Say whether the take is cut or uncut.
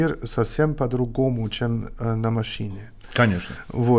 uncut